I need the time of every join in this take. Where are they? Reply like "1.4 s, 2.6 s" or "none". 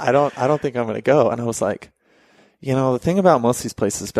none

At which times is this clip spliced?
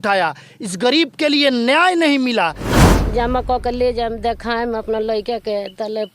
2.7 s

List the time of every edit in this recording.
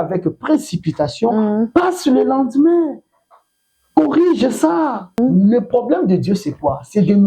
5.2 s

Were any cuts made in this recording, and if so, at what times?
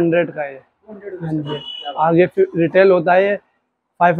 none

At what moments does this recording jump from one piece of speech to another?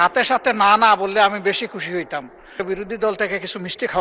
2.6 s

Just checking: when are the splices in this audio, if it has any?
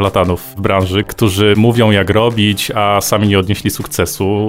1.6 s

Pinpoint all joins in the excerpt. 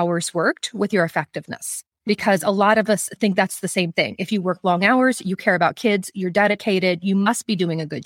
none

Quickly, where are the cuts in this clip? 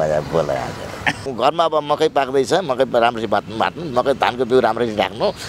1.3 s

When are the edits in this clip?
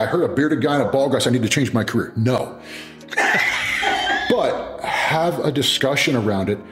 none

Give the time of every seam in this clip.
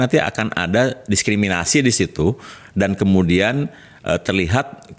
none

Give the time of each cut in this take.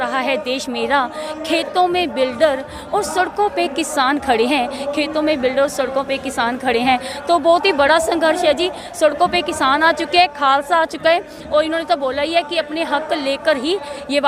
none

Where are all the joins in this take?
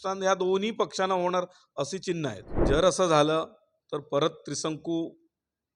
2.6 s

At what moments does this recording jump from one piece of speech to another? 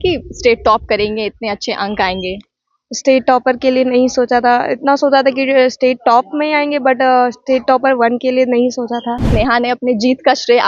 9.2 s

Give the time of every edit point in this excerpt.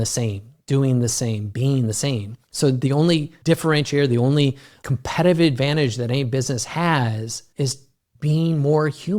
2.4 s, 3.3 s, 4.7 s, 7.9 s

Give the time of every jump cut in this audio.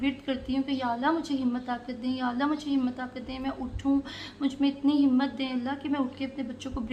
none

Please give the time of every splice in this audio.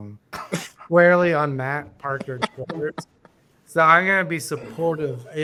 none

